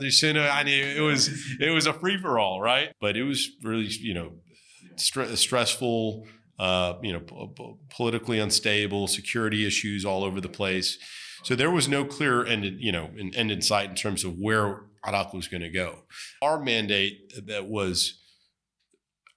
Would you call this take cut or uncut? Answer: cut